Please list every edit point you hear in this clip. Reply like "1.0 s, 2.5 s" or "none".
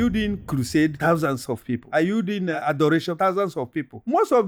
none